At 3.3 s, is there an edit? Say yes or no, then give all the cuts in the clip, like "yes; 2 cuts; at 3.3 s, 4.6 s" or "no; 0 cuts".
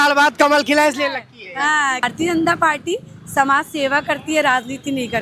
no; 1 cut; at 2.1 s